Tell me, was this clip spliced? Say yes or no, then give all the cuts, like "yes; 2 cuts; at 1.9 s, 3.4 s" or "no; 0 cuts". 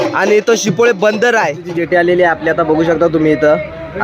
yes; 1 cut; at 1.8 s